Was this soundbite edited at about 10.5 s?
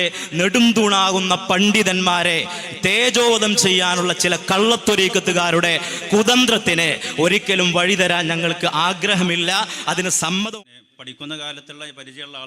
yes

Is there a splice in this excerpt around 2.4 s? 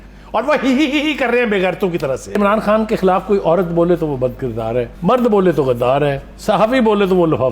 yes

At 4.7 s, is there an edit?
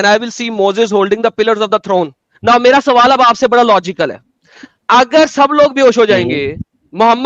no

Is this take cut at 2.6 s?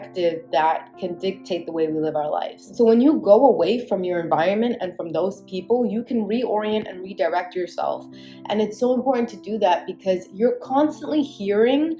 yes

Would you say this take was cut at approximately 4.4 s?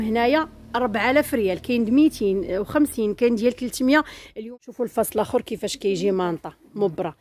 yes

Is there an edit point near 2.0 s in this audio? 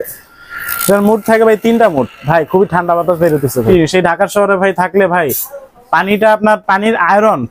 no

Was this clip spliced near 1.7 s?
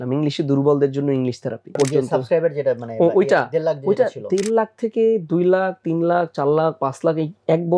yes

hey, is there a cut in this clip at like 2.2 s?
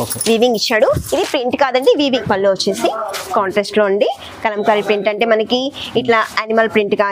yes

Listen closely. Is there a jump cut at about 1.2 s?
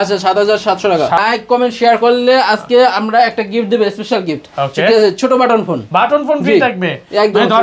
yes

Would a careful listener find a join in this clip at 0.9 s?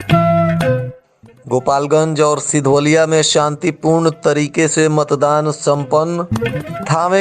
yes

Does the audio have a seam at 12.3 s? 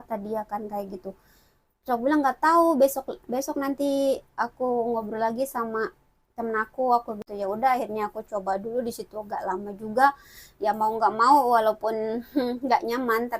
no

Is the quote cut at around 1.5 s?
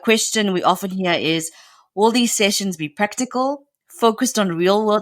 no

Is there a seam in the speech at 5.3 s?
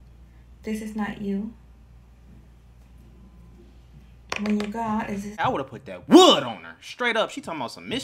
yes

